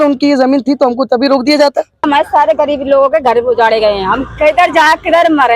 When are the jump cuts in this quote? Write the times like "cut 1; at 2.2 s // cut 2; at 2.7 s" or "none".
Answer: cut 1; at 2.1 s